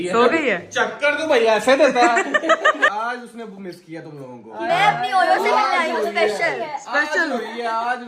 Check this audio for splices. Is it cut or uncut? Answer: cut